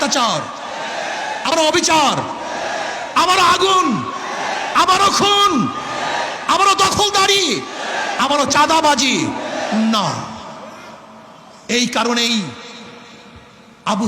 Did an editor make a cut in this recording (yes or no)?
yes